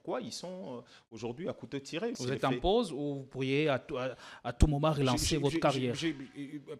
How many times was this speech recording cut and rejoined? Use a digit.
1